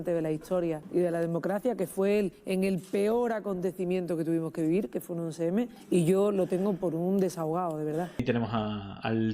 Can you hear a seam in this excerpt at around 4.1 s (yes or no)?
no